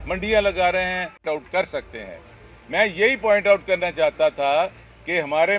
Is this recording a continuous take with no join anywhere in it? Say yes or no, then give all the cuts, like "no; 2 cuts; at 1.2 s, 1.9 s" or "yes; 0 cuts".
no; 1 cut; at 1.1 s